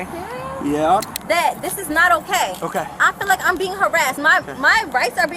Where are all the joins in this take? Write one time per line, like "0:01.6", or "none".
0:01.1